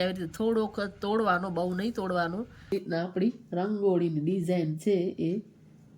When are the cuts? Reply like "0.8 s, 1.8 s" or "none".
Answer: 2.7 s